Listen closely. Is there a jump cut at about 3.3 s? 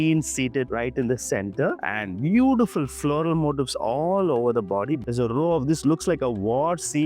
no; 2 cuts; at 1.8 s, 5.1 s

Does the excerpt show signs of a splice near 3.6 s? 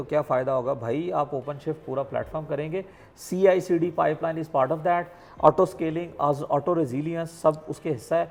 no; 0 cuts

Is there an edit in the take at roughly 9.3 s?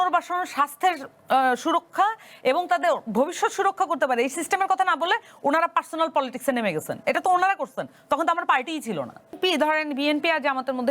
yes; 1 cut; at 9.3 s

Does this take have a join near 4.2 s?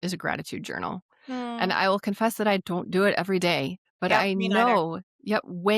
yes; 1 cut; at 4.2 s

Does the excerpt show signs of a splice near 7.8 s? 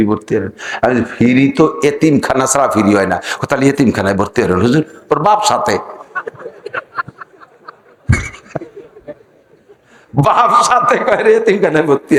no; 0 cuts

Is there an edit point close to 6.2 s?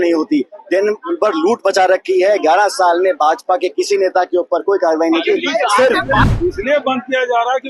yes; 1 cut; at 6.2 s

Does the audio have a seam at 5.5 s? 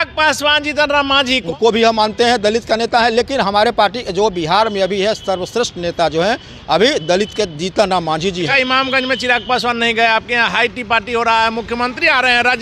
no; 2 cuts; at 1.4 s, 8.5 s

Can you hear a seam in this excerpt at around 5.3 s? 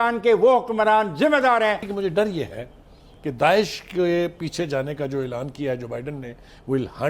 no; 1 cut; at 1.9 s

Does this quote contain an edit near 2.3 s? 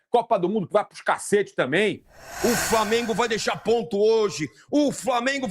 yes; 1 cut; at 2.3 s

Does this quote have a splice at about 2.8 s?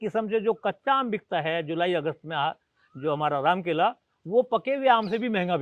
no; 0 cuts

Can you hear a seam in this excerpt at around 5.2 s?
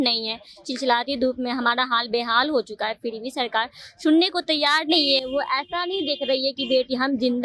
no; 0 cuts

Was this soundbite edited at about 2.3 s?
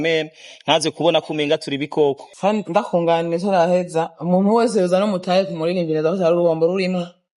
yes; 1 cut; at 2.3 s

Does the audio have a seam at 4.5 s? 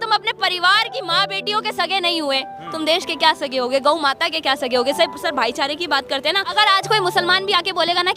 no; 1 cut; at 6.4 s

